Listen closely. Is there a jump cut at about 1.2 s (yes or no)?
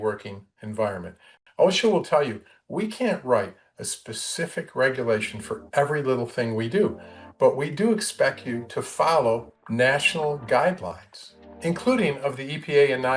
yes